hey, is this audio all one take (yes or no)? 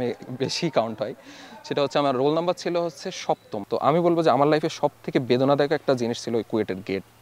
no